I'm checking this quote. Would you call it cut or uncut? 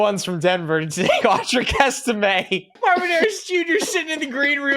cut